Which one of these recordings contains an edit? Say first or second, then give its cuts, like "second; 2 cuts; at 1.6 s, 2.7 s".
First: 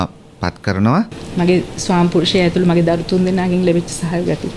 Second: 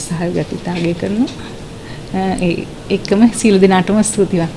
first; 1 cut; at 1.2 s